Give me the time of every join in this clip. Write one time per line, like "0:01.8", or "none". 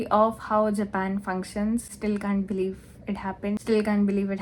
0:01.9
0:03.6